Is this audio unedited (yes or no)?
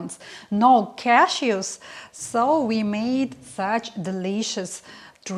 yes